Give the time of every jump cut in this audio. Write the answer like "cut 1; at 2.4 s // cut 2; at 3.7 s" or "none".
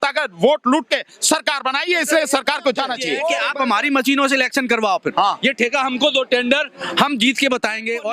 cut 1; at 3.3 s